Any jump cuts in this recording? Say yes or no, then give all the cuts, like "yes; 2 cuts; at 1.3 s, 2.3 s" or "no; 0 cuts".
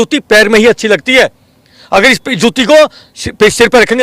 no; 0 cuts